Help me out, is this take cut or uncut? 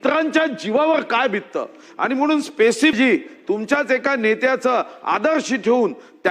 cut